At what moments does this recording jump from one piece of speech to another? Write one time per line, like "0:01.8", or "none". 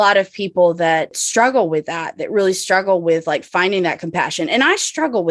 0:01.2